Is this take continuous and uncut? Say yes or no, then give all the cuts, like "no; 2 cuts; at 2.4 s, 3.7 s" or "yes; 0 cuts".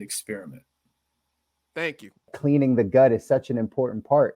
no; 1 cut; at 2.3 s